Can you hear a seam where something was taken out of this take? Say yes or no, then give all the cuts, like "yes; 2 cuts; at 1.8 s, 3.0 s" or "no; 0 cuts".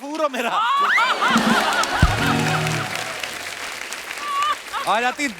no; 0 cuts